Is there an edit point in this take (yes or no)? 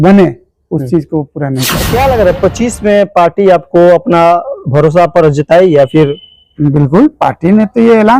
yes